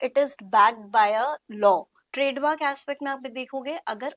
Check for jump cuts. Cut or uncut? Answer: cut